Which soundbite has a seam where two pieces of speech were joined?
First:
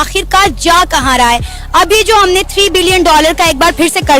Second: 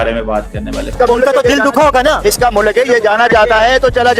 second; 1 cut; at 0.9 s

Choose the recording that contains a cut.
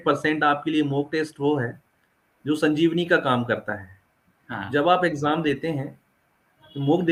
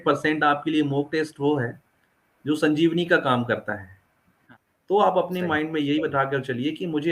second; 1 cut; at 4.5 s

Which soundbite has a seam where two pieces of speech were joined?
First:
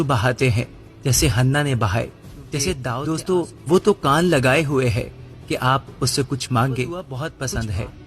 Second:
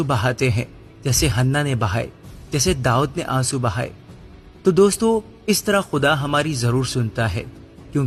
first; 2 cuts; at 2.9 s, 7.2 s

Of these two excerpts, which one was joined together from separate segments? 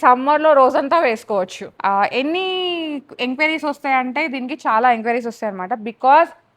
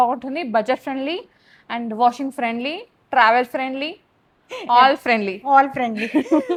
first; 1 cut; at 1.6 s

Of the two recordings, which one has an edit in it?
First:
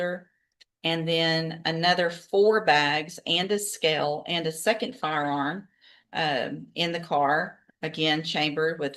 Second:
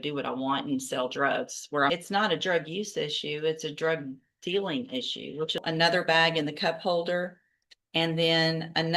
second; 2 cuts; at 1.9 s, 5.6 s

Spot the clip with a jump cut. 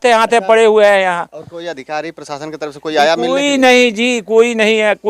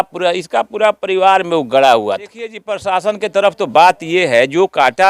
second; 1 cut; at 2.7 s

